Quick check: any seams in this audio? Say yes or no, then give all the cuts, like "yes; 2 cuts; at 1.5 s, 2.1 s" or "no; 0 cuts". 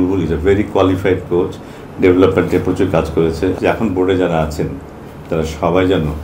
yes; 1 cut; at 3.6 s